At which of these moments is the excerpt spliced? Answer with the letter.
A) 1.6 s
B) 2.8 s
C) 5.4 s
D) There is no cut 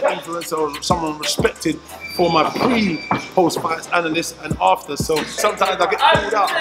C